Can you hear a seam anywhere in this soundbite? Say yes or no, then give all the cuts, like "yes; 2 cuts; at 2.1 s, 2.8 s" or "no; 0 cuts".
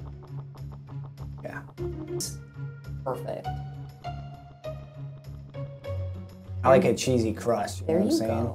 yes; 1 cut; at 2.2 s